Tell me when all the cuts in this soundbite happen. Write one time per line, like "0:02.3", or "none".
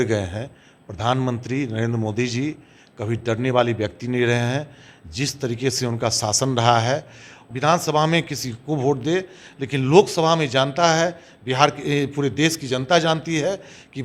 0:07.4